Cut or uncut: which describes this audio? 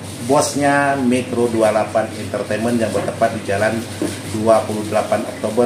uncut